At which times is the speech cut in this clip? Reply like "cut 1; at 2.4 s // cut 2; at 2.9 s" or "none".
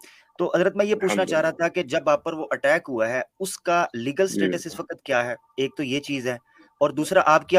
none